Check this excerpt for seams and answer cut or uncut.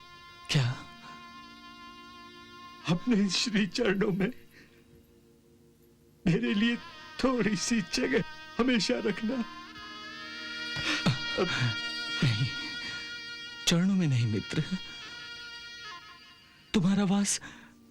uncut